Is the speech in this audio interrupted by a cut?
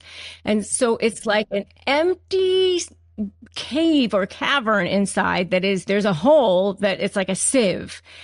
yes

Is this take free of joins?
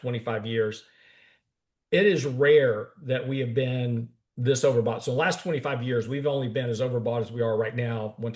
yes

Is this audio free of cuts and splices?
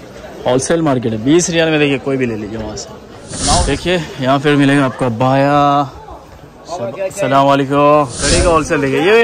no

